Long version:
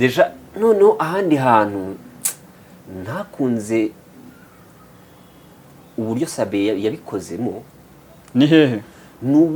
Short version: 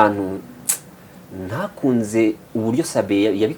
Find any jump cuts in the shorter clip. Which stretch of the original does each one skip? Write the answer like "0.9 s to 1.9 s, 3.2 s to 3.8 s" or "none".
4.0 s to 5.9 s